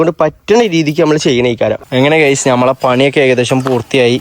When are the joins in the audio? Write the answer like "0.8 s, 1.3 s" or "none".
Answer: 1.8 s